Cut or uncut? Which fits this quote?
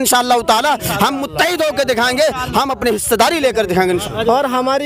uncut